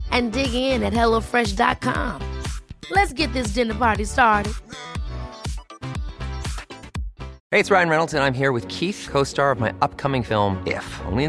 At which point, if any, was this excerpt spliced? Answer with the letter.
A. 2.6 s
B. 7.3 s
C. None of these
B